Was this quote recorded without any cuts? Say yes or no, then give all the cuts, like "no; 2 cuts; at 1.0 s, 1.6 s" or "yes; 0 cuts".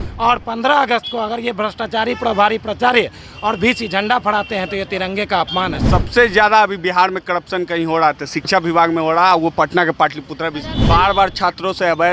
no; 2 cuts; at 5.8 s, 10.7 s